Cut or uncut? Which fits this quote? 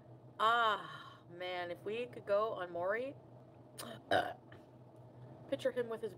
uncut